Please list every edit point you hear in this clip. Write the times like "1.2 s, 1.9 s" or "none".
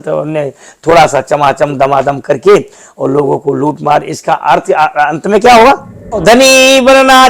6.2 s